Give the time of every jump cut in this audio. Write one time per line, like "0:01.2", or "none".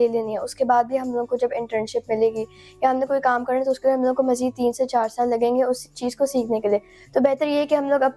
none